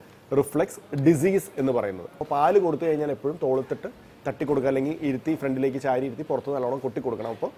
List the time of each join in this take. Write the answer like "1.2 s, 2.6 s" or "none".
2.2 s